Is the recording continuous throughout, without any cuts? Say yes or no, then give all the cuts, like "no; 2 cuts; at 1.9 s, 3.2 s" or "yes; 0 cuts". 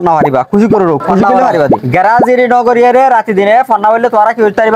no; 1 cut; at 1.8 s